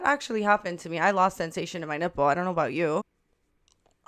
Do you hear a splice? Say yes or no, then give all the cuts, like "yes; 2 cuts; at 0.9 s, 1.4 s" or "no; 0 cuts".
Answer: yes; 1 cut; at 3.0 s